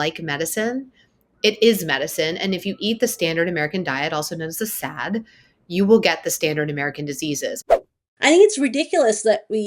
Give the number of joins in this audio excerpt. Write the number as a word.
one